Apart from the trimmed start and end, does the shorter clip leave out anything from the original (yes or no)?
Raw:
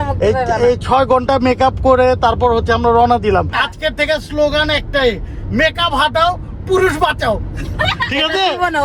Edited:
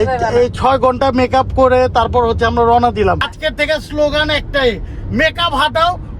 yes